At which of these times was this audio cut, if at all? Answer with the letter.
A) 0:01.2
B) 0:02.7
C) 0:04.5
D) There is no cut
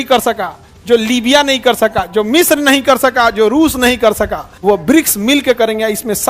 C